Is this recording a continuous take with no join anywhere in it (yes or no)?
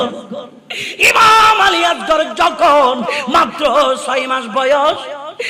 no